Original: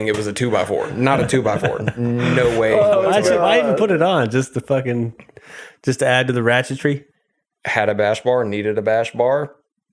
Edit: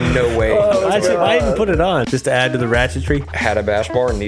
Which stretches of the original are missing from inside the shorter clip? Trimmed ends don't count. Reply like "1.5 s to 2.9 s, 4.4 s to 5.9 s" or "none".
4.3 s to 5.8 s, 7.1 s to 7.6 s